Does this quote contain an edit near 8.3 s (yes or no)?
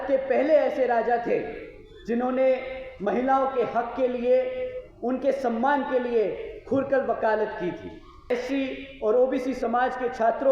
yes